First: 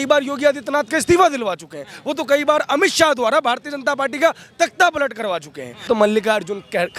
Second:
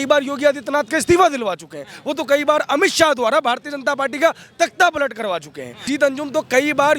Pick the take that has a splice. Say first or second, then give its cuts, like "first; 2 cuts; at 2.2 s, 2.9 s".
first; 1 cut; at 5.9 s